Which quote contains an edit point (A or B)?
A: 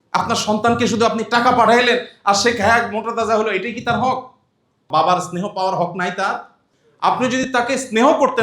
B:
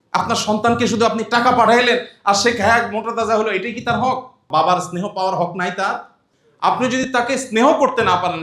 B